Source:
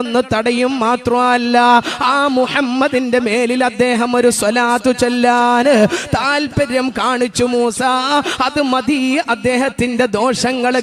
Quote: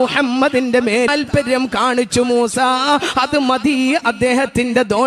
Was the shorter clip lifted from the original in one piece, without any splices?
no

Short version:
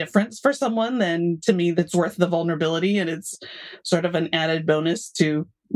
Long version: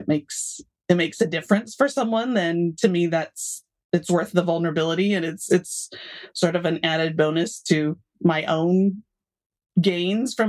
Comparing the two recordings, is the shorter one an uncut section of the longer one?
no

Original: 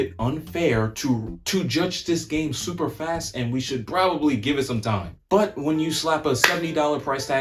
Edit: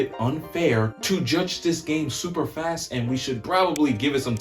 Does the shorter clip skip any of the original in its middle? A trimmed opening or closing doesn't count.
yes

